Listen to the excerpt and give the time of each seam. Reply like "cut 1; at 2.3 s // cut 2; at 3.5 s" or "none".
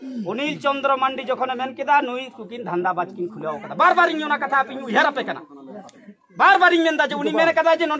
none